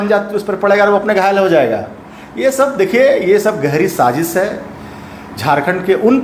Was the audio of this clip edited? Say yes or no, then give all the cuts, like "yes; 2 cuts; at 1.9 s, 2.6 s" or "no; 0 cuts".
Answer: no; 0 cuts